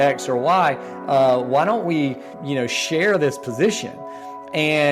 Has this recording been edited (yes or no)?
yes